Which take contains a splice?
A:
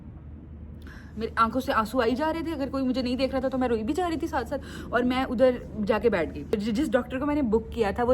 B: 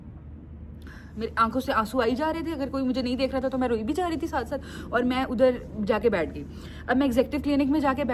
A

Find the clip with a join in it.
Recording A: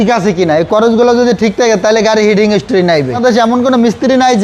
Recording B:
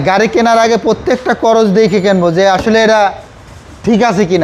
A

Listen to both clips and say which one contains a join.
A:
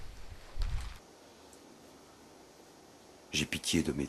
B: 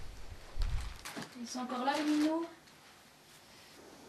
B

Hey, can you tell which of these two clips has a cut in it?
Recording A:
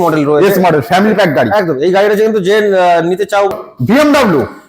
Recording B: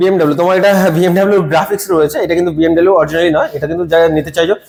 A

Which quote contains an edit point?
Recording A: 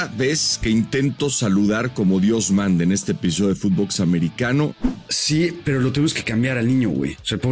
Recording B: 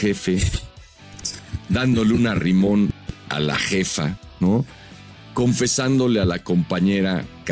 A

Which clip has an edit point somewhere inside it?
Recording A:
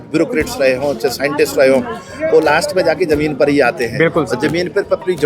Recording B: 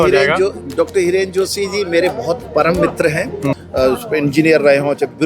B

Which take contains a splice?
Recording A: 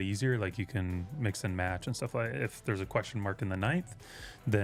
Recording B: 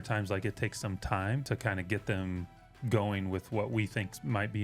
B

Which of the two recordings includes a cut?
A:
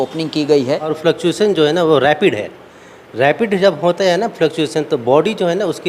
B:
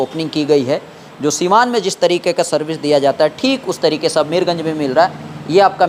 A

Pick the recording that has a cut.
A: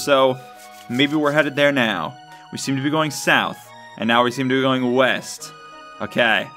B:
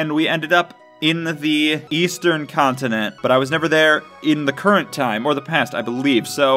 B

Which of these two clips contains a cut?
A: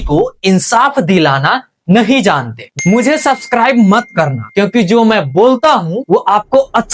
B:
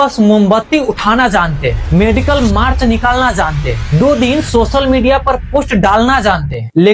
A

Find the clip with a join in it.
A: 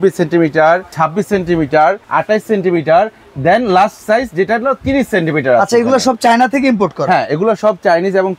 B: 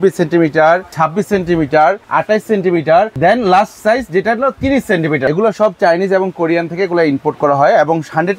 B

